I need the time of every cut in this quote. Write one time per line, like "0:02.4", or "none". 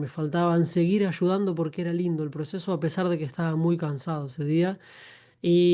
none